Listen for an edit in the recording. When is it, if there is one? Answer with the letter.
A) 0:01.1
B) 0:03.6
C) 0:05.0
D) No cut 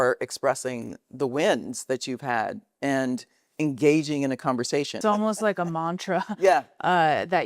C